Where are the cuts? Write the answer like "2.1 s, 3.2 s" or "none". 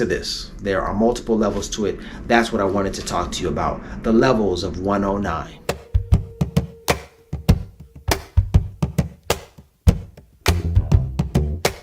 5.5 s